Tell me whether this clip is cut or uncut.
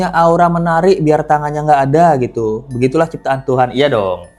uncut